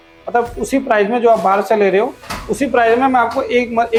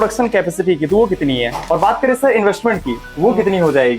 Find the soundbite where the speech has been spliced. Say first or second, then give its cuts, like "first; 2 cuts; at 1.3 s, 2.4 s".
second; 1 cut; at 1.6 s